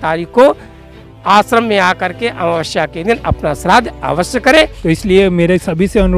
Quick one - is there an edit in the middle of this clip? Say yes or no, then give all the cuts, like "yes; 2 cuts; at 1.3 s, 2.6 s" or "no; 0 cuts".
yes; 1 cut; at 4.8 s